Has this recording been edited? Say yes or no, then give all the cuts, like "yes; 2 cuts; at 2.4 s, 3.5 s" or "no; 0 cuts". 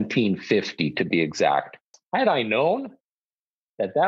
yes; 1 cut; at 2.0 s